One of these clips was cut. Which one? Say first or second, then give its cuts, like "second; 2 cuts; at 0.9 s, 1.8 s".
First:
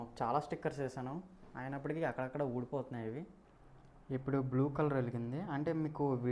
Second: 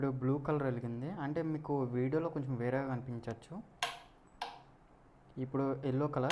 first; 1 cut; at 3.4 s